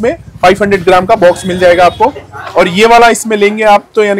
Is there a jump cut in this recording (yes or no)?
no